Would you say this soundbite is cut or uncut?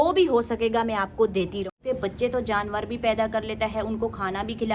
cut